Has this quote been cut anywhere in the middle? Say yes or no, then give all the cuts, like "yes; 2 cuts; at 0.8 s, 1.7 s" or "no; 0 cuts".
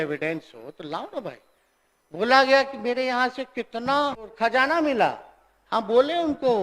yes; 1 cut; at 4.3 s